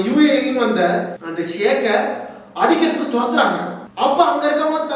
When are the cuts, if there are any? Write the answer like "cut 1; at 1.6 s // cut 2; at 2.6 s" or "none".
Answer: none